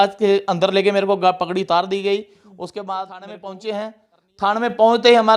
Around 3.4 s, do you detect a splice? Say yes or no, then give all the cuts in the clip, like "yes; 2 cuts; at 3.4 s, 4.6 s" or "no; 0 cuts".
yes; 1 cut; at 3.4 s